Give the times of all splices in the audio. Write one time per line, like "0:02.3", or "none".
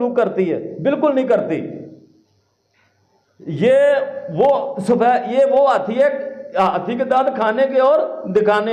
none